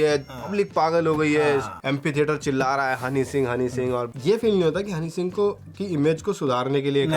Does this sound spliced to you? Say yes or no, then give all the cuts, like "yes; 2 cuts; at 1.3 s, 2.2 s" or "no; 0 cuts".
yes; 2 cuts; at 1.7 s, 4.1 s